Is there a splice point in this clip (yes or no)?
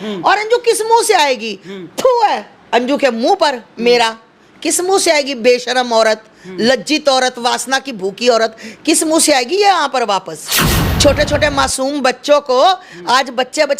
yes